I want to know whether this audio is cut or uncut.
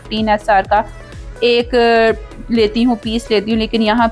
uncut